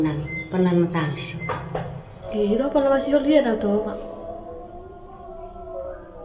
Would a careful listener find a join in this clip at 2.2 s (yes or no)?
yes